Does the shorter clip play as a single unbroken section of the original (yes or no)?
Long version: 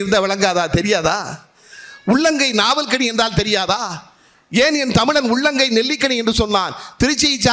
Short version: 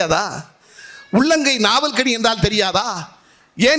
yes